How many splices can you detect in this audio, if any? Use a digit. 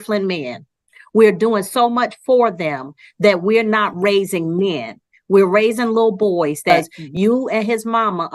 1